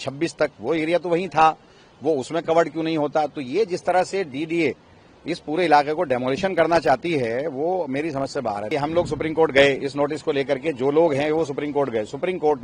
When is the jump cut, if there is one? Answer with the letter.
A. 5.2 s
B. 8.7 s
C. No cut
B